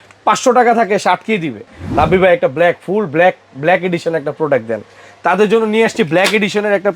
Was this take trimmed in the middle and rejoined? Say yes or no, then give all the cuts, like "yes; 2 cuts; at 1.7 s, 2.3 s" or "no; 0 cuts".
yes; 1 cut; at 1.6 s